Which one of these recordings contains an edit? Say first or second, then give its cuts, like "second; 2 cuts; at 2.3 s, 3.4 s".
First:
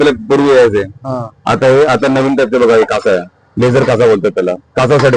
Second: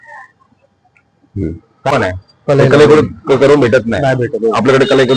second; 1 cut; at 1.9 s